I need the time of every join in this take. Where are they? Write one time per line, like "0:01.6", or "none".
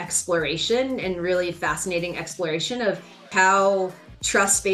0:03.3